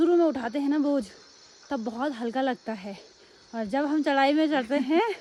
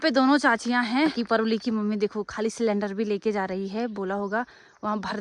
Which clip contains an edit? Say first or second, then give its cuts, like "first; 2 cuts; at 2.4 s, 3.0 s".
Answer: second; 1 cut; at 1.1 s